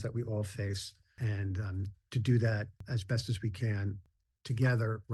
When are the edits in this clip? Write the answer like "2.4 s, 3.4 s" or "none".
1.1 s, 2.8 s, 4.1 s